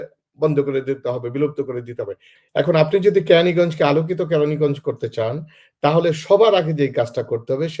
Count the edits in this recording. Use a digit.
1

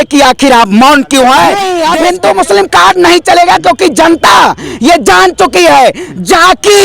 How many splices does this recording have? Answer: 1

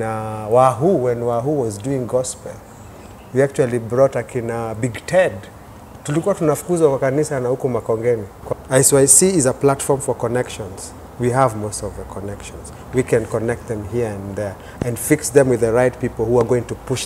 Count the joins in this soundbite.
1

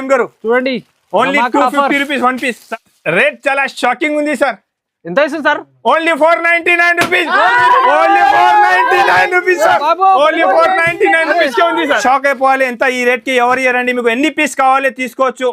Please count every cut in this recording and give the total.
2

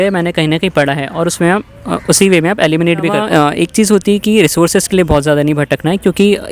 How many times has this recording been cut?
1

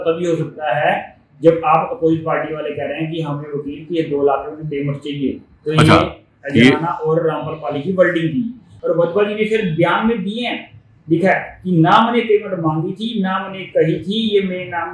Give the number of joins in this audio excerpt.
1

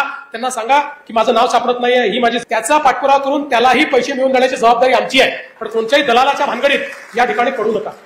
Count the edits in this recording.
1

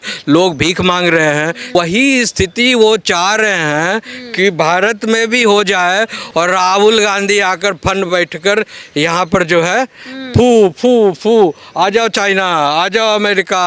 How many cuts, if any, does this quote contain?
2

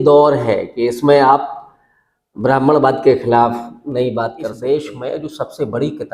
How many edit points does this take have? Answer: 1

